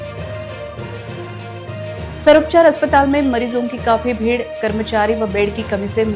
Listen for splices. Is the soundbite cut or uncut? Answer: uncut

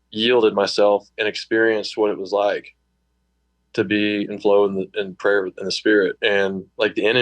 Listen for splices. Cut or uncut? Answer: cut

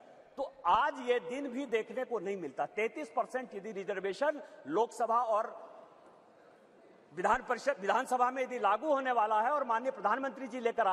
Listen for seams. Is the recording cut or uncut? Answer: uncut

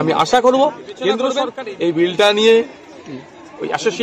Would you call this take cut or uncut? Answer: cut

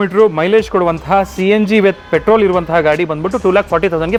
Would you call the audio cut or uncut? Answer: uncut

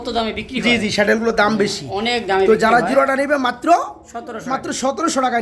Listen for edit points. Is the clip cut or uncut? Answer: uncut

